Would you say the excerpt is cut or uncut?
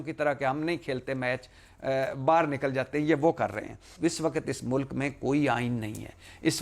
cut